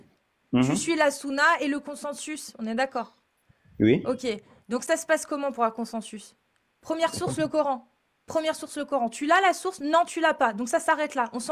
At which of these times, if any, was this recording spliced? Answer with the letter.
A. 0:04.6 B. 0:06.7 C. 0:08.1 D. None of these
D